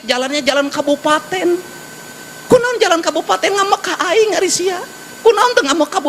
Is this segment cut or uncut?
uncut